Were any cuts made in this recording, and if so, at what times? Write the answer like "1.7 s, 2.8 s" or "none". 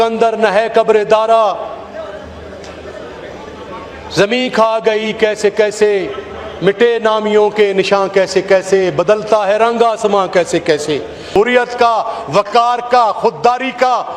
11.3 s